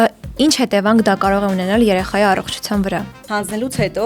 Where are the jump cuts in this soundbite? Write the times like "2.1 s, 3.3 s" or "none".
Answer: 3.2 s